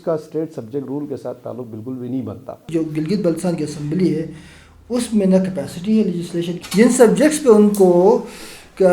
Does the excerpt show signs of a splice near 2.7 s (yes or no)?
yes